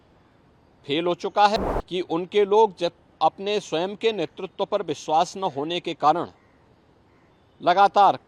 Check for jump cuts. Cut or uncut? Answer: cut